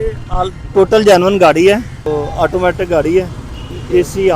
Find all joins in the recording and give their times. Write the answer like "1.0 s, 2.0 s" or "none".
2.0 s